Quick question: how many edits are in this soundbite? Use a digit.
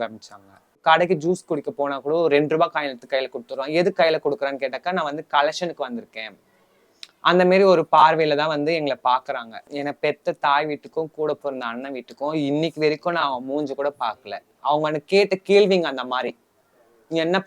2